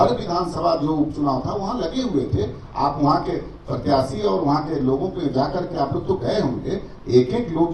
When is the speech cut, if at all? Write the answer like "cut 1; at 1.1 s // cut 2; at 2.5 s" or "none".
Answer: none